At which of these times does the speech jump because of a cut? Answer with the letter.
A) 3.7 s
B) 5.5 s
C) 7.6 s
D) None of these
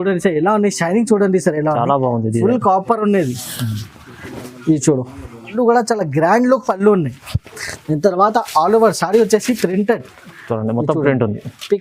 B